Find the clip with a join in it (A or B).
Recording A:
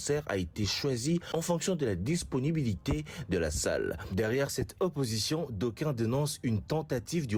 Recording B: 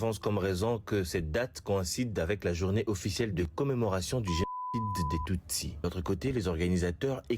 B